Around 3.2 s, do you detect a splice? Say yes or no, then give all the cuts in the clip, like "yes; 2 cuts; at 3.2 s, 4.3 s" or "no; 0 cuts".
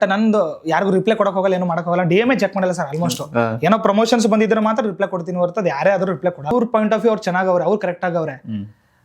no; 1 cut; at 6.5 s